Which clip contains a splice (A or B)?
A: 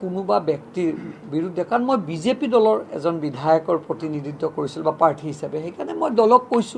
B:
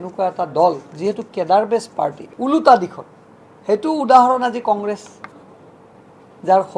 B